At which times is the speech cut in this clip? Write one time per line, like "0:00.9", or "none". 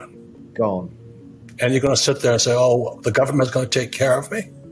none